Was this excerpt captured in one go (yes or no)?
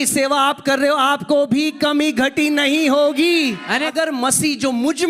no